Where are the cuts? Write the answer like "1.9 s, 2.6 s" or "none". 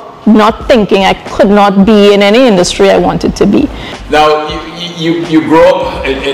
none